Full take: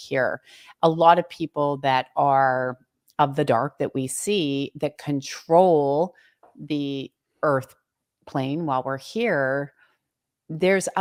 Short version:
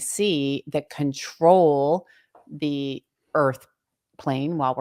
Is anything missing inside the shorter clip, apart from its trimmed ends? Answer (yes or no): no